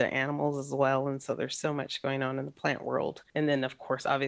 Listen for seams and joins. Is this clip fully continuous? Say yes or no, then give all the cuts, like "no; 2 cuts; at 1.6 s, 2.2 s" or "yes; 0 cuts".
no; 1 cut; at 3.2 s